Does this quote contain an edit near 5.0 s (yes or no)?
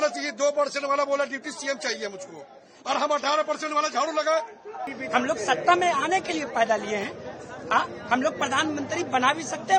yes